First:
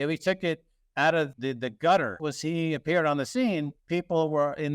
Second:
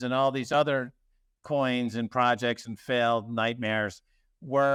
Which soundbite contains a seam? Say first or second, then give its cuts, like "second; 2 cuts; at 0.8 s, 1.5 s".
first; 2 cuts; at 1.3 s, 2.2 s